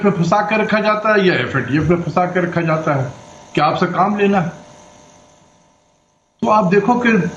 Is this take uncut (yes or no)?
yes